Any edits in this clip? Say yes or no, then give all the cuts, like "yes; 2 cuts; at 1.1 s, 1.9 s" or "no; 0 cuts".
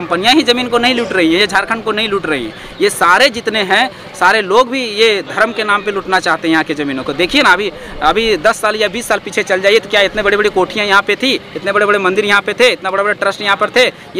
no; 0 cuts